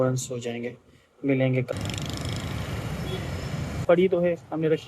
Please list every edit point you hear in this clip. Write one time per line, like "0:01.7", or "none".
0:01.7
0:03.8